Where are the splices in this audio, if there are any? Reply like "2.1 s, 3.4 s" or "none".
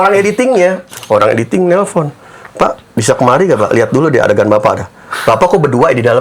0.9 s